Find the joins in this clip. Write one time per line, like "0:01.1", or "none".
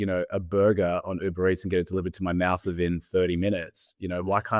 none